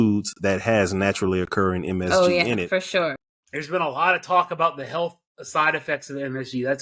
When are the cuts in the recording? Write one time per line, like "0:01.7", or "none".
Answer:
0:03.2